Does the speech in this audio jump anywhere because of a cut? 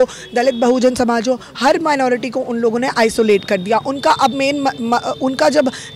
no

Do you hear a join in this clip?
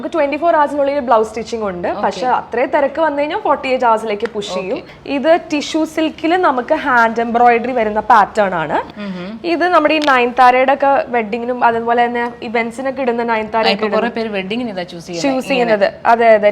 yes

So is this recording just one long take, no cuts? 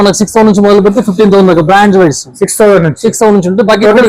yes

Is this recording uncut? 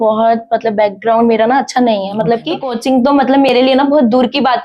no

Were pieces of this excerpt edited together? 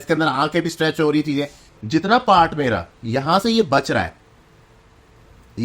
yes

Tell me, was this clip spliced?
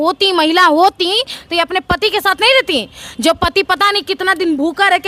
no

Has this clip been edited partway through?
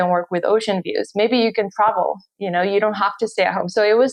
no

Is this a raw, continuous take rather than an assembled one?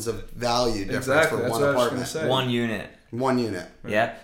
yes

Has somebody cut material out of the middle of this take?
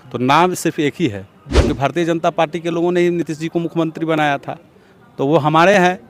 yes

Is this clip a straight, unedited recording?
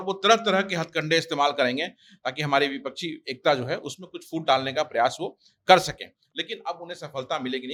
yes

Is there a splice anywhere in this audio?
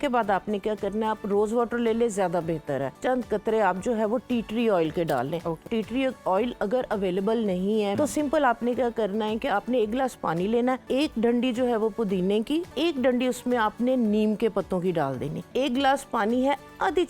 yes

